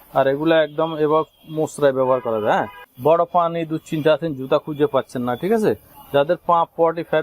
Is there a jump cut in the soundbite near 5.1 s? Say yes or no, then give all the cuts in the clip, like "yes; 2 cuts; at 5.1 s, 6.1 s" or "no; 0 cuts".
no; 1 cut; at 2.8 s